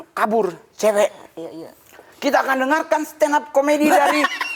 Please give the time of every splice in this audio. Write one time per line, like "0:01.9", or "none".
none